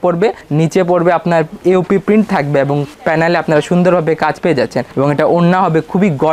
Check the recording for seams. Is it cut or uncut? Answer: uncut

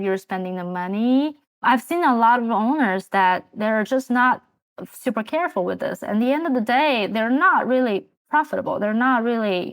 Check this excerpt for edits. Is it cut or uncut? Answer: cut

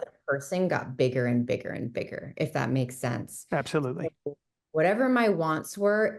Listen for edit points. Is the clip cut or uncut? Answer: uncut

